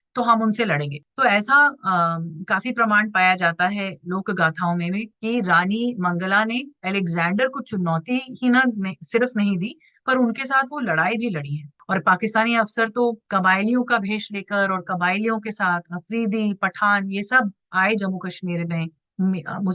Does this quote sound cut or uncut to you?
cut